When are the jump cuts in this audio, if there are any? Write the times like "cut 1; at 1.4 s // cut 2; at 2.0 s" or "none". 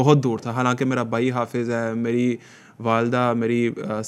none

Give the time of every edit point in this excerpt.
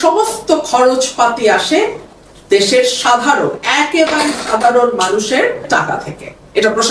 cut 1; at 5.7 s

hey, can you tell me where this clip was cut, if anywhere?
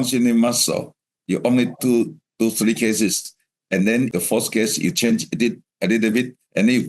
cut 1; at 4.1 s

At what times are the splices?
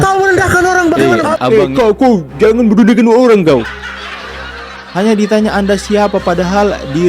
cut 1; at 1.5 s

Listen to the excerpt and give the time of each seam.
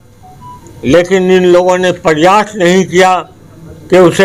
none

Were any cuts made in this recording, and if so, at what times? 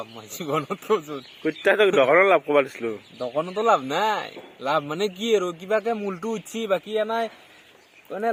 none

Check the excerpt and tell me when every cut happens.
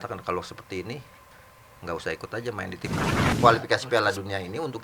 cut 1; at 3.3 s

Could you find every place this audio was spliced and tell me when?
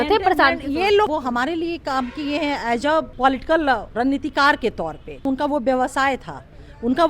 cut 1; at 1.1 s // cut 2; at 3.1 s // cut 3; at 3.9 s // cut 4; at 5.2 s

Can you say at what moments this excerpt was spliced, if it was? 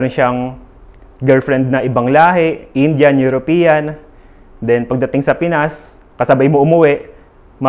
none

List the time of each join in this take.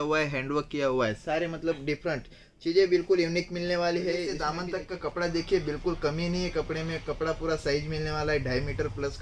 cut 1; at 4.4 s

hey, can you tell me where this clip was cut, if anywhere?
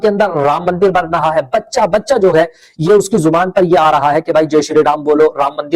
none

